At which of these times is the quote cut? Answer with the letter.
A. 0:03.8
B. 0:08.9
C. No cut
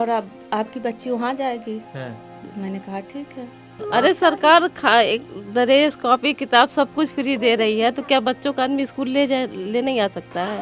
A